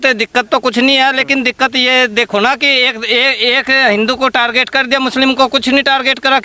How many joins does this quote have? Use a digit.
0